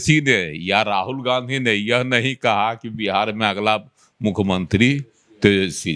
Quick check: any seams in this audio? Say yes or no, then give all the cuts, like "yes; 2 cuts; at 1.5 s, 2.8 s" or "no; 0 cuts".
no; 0 cuts